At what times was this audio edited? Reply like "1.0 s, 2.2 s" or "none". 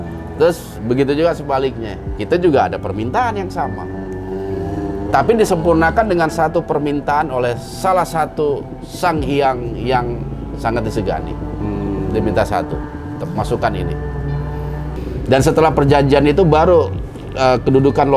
14.9 s